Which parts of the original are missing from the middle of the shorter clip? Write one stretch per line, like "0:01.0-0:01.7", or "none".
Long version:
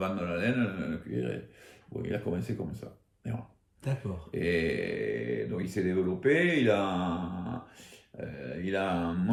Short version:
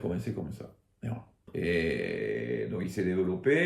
0:03.7-0:04.2